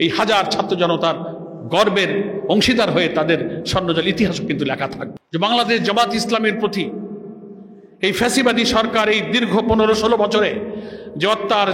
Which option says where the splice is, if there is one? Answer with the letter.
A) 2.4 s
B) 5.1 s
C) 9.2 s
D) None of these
B